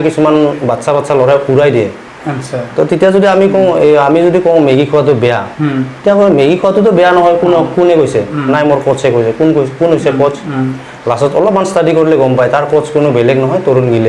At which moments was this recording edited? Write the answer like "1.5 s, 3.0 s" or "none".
none